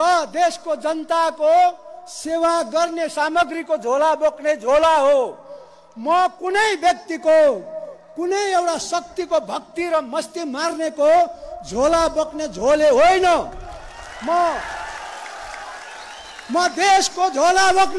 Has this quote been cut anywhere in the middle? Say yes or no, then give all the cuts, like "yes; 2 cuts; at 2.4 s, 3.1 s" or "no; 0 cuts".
no; 0 cuts